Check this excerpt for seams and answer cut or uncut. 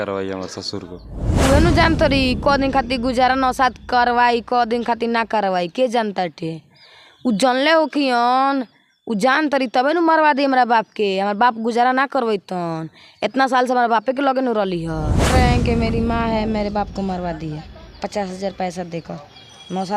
cut